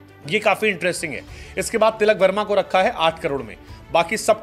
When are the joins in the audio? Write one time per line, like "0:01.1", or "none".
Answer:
none